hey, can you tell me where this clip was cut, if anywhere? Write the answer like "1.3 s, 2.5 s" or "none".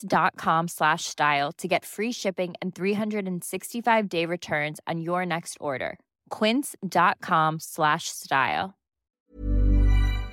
9.3 s